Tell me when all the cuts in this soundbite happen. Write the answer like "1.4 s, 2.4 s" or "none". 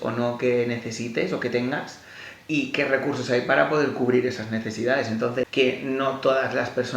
5.5 s